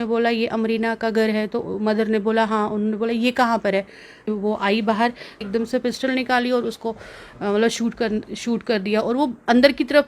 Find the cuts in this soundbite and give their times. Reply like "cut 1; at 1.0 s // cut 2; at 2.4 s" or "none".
cut 1; at 4.3 s // cut 2; at 5.4 s